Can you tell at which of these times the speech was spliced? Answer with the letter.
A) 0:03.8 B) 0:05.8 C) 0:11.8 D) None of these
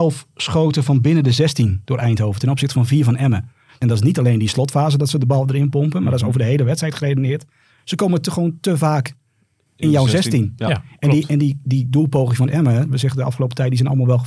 A